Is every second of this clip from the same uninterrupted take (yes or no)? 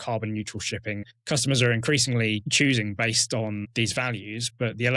no